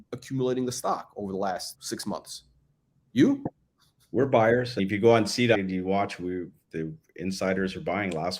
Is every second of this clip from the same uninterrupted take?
no; 1 cut; at 5.6 s

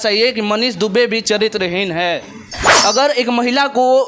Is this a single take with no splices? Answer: no; 1 cut; at 2.6 s

